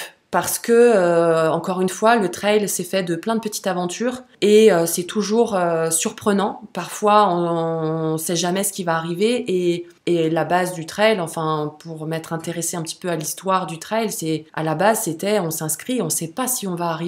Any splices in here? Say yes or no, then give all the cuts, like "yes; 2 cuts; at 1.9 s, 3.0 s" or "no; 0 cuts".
yes; 3 cuts; at 4.3 s, 9.9 s, 14.5 s